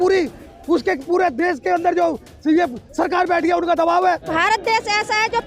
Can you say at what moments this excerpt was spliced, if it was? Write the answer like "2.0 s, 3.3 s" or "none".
4.3 s